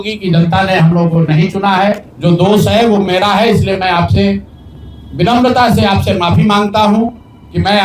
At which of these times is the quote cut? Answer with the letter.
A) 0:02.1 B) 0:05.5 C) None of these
A